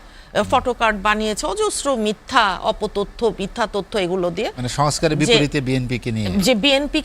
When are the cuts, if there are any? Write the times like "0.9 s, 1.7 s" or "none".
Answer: none

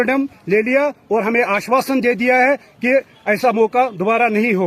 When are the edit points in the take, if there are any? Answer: none

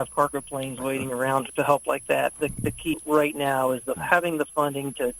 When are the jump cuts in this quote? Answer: 1.5 s, 2.6 s

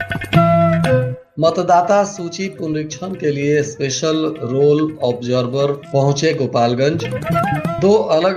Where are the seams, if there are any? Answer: 1.2 s

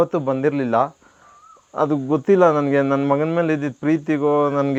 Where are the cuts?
none

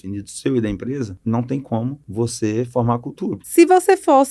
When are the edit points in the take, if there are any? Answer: 1.1 s, 2.0 s, 3.4 s

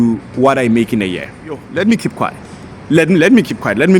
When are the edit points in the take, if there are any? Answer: 1.6 s

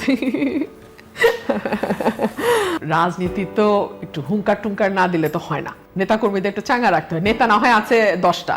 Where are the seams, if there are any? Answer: 2.8 s

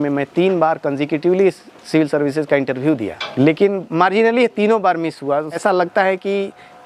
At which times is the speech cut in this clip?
3.2 s, 5.6 s

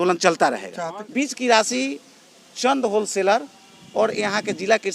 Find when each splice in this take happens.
1.0 s

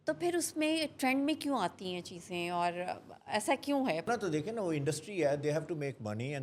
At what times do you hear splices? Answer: 4.1 s

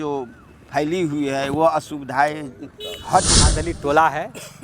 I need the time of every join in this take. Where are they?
3.7 s

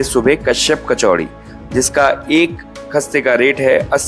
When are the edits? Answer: none

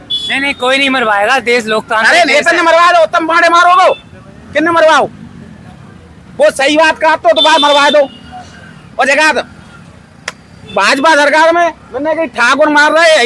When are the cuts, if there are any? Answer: none

